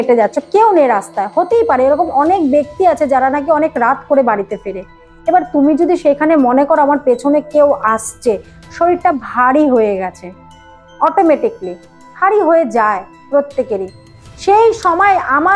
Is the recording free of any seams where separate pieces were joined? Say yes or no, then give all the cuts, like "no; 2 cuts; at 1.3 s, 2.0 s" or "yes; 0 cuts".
yes; 0 cuts